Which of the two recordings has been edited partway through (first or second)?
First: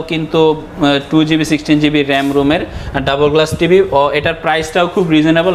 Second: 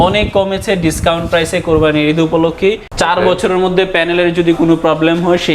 second